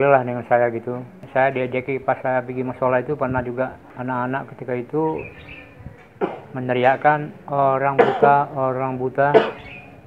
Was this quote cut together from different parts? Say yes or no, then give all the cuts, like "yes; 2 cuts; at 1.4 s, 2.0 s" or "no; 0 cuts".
yes; 2 cuts; at 1.2 s, 3.9 s